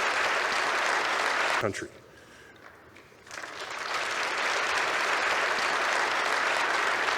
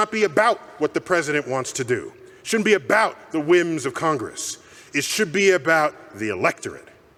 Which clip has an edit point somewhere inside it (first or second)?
first